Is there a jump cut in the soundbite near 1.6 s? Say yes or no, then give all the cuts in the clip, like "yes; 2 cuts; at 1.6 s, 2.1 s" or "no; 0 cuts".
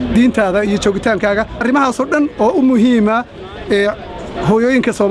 yes; 1 cut; at 1.6 s